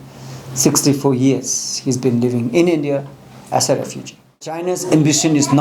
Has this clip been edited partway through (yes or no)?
yes